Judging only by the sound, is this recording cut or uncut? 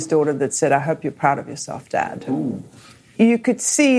cut